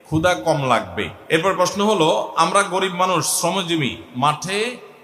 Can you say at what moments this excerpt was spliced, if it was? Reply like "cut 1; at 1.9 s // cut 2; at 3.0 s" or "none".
cut 1; at 1.1 s